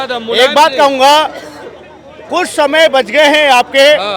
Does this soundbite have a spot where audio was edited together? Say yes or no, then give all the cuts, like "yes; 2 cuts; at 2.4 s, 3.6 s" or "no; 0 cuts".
no; 0 cuts